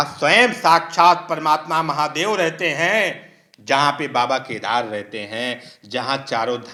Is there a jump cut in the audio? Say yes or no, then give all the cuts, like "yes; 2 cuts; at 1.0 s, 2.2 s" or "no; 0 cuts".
no; 0 cuts